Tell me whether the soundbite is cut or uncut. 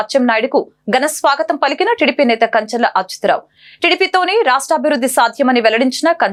uncut